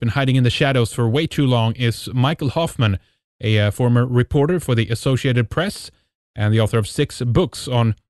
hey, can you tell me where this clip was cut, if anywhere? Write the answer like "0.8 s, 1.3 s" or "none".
5.3 s